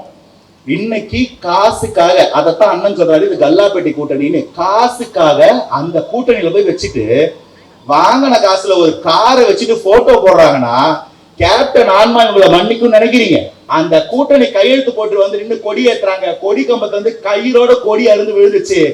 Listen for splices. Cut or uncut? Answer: cut